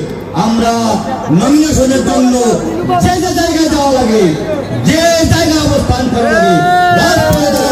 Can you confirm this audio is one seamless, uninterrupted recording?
yes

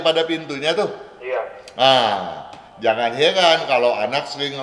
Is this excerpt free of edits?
yes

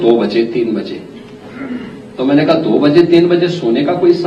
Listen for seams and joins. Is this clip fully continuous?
yes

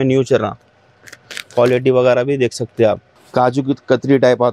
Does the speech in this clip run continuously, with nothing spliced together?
no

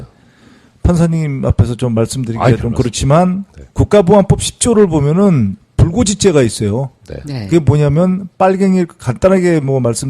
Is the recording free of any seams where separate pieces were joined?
no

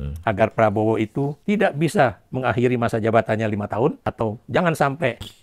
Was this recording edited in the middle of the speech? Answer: yes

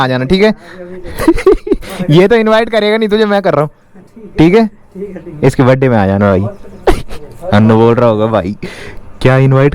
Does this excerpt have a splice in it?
no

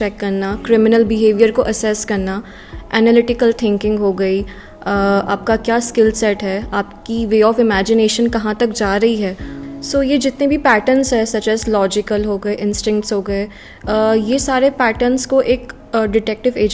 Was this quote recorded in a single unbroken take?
yes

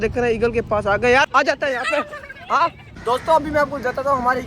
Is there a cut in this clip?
yes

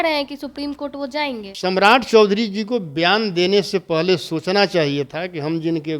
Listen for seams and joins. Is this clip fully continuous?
no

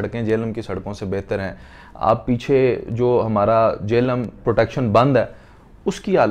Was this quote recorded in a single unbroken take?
yes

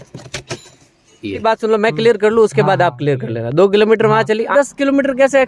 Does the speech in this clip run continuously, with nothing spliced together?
no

